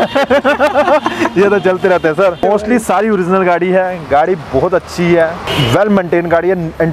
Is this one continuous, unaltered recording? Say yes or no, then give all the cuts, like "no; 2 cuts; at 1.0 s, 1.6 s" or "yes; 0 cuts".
yes; 0 cuts